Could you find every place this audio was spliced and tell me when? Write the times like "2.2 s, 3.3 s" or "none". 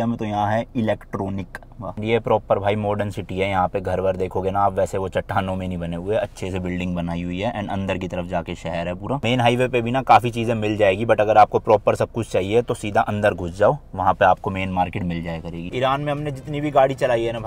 none